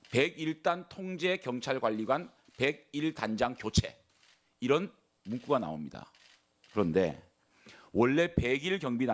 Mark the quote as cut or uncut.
uncut